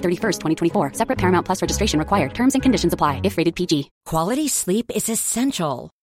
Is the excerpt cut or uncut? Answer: cut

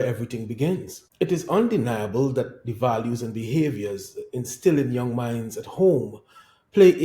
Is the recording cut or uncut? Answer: cut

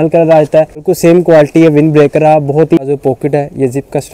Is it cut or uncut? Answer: cut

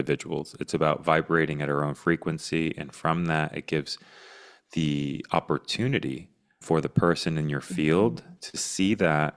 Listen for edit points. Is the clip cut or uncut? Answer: uncut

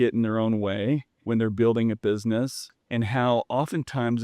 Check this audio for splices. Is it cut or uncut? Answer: cut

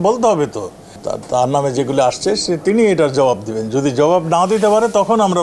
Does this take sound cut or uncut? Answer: cut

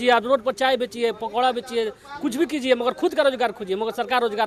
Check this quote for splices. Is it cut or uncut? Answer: uncut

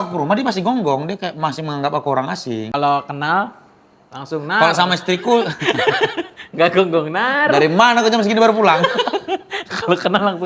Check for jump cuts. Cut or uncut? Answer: cut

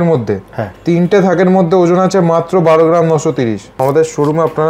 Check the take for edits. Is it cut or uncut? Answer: cut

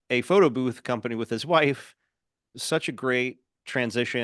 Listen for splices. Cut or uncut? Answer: uncut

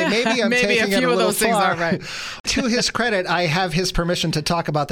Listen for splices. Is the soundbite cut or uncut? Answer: cut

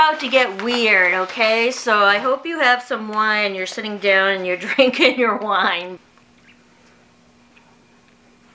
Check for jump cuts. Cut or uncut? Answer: cut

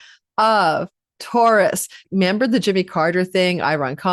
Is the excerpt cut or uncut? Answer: cut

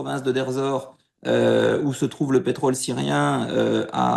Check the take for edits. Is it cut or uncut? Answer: uncut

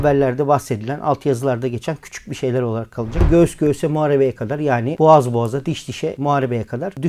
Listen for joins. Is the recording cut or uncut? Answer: cut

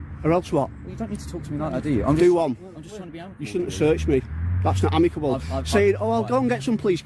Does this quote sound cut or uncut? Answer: uncut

